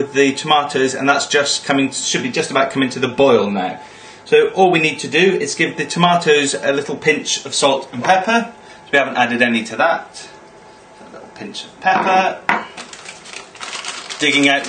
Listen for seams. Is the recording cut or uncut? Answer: uncut